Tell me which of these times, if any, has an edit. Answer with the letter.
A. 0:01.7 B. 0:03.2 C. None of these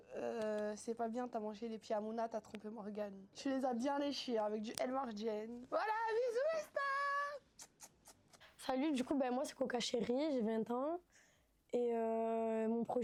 C